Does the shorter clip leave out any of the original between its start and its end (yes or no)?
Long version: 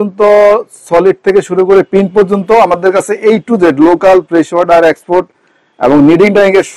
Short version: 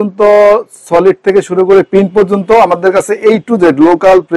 no